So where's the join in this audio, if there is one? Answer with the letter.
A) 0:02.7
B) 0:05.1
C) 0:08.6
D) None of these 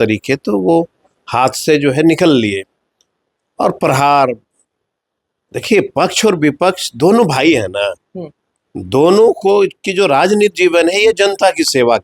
D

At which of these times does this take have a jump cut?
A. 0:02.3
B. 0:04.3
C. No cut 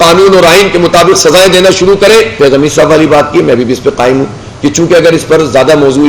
A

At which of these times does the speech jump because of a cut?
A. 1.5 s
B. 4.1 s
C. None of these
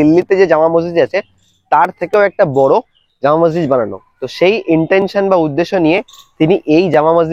C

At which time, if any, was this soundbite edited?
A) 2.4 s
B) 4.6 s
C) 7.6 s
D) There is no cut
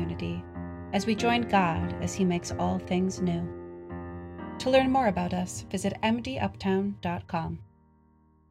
C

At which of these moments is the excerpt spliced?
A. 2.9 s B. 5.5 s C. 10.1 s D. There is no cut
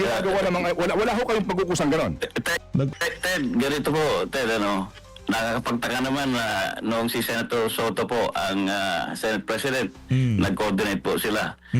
A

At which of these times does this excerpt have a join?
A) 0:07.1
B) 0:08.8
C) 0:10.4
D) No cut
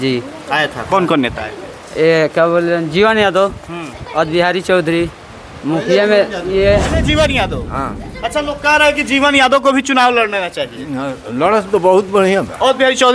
A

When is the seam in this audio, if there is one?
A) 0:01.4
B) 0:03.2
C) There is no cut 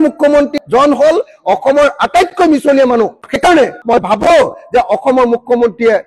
C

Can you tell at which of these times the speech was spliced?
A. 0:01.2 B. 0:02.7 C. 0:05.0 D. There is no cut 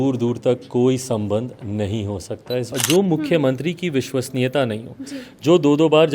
B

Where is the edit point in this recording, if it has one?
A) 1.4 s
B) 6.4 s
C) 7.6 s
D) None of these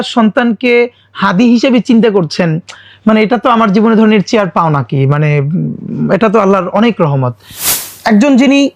C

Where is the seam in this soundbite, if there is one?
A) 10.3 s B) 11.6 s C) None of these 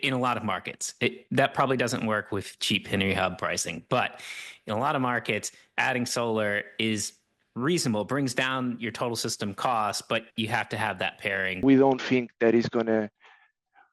B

